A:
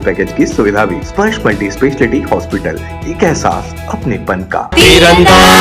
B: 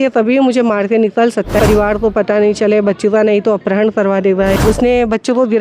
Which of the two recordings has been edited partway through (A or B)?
B